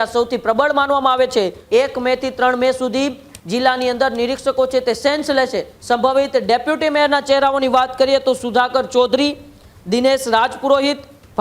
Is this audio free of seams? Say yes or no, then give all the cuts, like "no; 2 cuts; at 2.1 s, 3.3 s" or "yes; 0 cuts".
no; 2 cuts; at 1.6 s, 5.7 s